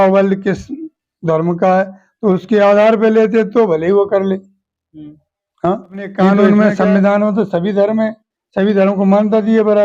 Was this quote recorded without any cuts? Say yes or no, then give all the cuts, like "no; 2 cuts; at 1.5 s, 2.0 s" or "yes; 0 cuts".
no; 1 cut; at 6.4 s